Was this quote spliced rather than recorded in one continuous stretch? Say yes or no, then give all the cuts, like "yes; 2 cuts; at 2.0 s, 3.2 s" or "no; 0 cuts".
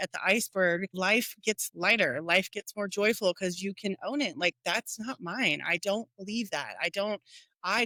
no; 0 cuts